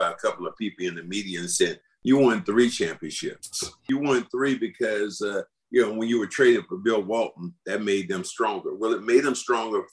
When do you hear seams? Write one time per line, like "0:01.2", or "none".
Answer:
0:01.9
0:03.9